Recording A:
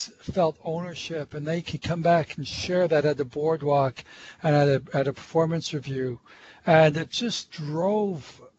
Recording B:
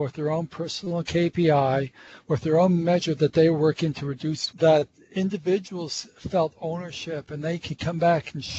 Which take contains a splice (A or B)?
B